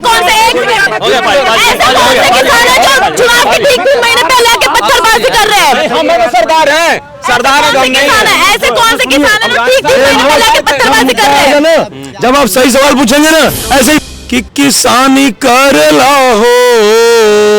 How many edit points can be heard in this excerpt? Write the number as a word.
one